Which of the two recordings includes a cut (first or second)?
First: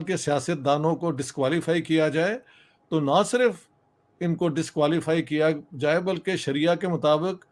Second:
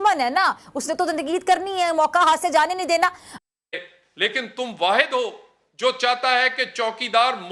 second